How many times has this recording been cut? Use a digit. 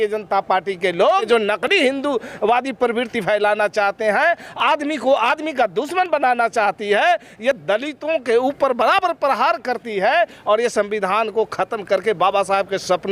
1